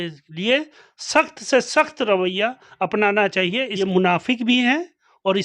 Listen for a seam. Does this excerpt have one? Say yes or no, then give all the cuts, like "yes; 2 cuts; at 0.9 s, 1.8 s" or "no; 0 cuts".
yes; 1 cut; at 3.7 s